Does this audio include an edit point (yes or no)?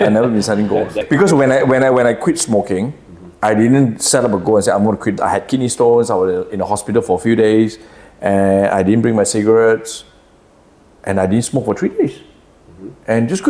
yes